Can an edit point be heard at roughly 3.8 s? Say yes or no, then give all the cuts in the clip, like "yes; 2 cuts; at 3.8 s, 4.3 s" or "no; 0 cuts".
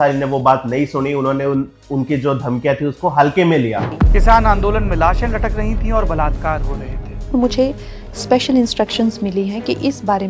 yes; 1 cut; at 3.8 s